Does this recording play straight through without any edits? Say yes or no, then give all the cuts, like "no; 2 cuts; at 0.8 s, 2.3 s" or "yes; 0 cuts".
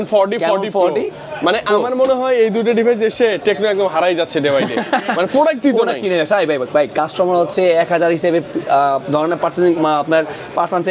yes; 0 cuts